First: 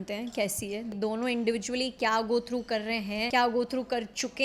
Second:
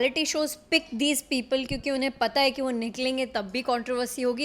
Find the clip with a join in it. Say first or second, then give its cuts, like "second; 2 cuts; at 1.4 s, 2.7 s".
first; 2 cuts; at 0.9 s, 3.3 s